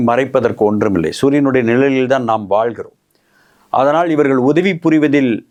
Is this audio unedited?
yes; 0 cuts

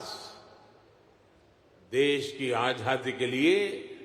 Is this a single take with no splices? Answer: no; 1 cut; at 3.1 s

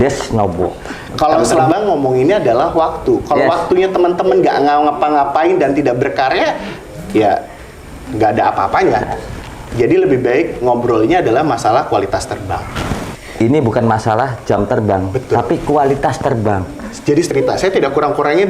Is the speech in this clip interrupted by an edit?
yes; 3 cuts; at 1.7 s, 13.1 s, 17.3 s

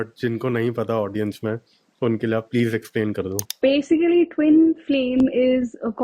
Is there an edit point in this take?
yes; 1 cut; at 3.4 s

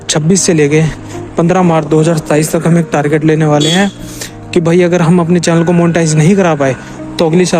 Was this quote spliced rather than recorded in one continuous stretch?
no; 0 cuts

